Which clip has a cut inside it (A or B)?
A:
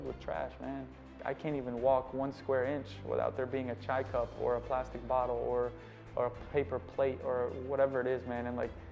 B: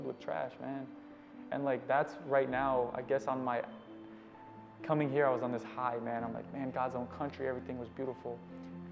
A